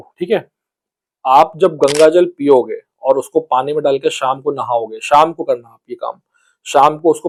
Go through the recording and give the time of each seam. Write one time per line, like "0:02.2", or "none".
none